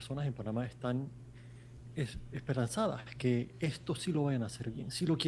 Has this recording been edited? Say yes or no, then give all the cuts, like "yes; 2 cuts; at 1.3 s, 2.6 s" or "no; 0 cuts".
no; 0 cuts